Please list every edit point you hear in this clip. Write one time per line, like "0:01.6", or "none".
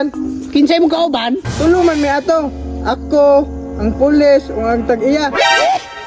none